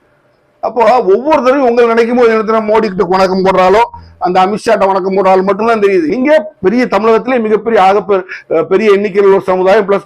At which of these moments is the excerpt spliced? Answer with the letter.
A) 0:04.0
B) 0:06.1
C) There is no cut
B